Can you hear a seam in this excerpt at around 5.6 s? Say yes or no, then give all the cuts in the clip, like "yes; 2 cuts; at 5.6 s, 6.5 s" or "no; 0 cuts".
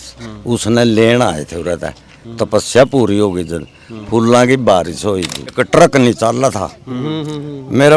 yes; 1 cut; at 5.6 s